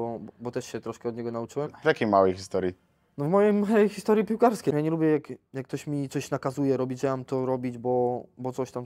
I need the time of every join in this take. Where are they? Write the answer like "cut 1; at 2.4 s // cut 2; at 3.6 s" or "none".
cut 1; at 1.8 s // cut 2; at 4.7 s